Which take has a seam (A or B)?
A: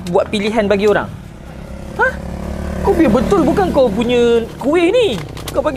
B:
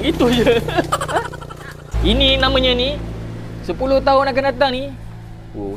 B